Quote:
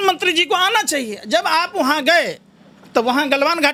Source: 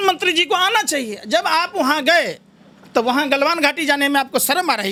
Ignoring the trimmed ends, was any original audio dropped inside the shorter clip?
no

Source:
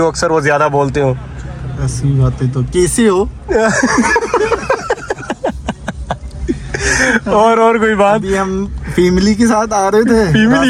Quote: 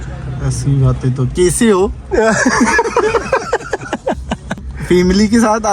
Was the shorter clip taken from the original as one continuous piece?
no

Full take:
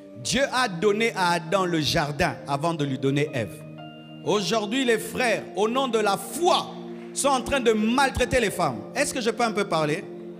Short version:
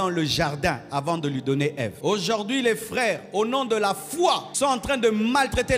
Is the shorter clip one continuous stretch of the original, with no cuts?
no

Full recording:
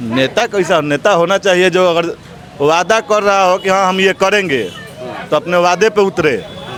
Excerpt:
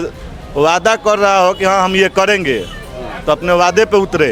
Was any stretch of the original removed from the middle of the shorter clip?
no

